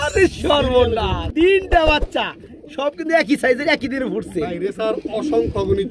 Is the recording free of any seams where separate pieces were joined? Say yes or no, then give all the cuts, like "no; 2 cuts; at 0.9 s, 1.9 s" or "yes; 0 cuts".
no; 1 cut; at 1.2 s